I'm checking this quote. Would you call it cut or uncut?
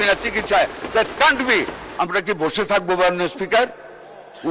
cut